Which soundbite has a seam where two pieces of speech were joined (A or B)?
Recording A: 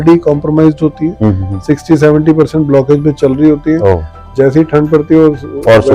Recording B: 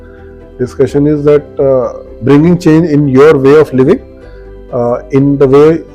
B